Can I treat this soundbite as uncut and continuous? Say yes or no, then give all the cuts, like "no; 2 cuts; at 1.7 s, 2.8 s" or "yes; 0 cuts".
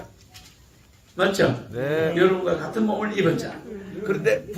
yes; 0 cuts